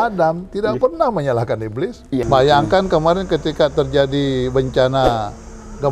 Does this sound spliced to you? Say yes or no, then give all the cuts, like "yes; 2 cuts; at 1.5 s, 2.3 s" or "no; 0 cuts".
yes; 1 cut; at 2.2 s